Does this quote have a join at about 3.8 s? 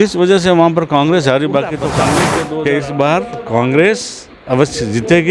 no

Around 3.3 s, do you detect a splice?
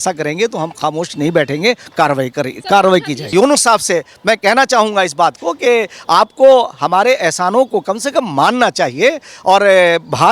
yes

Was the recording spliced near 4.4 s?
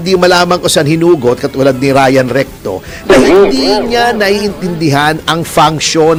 no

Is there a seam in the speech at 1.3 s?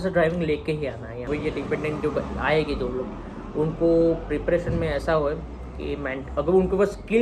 yes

